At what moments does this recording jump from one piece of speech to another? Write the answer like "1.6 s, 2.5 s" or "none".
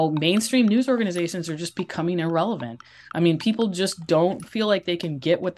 4.4 s